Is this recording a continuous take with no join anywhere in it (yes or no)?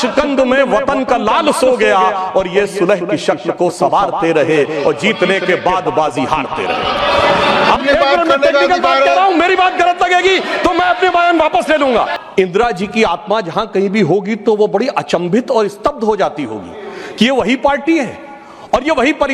no